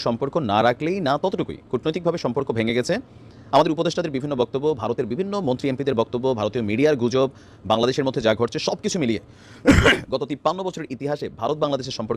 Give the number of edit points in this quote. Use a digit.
0